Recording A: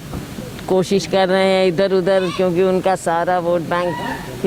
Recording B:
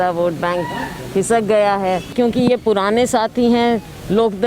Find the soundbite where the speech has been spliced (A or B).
B